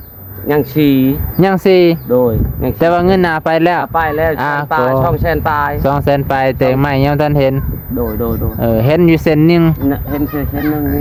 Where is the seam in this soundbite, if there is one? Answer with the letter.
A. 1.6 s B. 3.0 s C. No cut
C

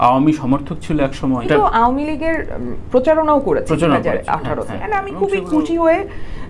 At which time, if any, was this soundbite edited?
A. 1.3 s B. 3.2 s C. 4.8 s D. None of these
C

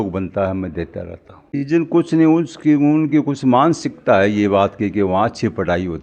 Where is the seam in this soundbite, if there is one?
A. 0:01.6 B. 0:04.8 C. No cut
A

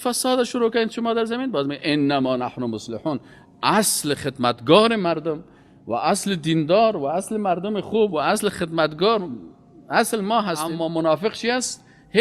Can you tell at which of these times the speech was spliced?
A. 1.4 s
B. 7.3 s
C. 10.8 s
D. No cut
C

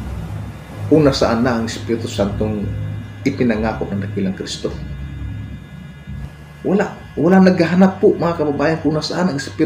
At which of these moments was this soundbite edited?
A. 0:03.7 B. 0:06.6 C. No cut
B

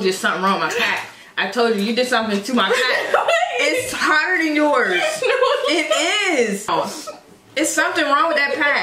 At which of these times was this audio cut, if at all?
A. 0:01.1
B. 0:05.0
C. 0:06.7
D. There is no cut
C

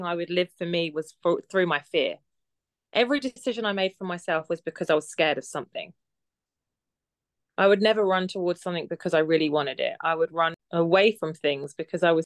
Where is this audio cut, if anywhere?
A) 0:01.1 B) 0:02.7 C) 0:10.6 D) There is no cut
C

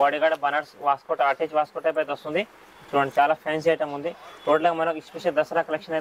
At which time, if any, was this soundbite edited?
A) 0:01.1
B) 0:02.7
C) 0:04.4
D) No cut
D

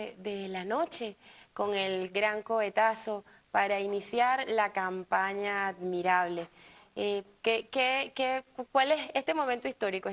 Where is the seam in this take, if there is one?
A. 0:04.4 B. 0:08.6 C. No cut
A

